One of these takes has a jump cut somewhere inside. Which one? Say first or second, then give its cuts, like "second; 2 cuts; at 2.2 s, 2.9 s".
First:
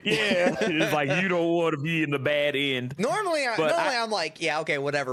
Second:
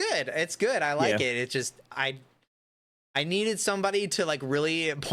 second; 1 cut; at 1.9 s